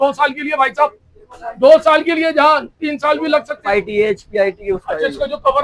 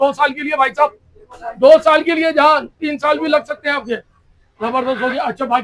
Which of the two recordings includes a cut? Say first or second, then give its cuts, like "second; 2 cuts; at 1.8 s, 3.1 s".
first; 1 cut; at 3.6 s